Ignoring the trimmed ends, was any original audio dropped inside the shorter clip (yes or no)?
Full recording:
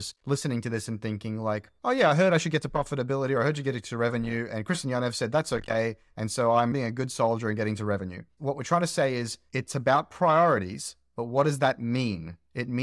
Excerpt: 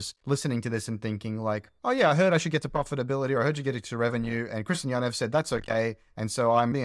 no